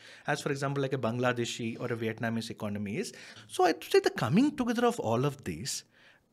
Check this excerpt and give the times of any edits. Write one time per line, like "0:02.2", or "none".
0:03.2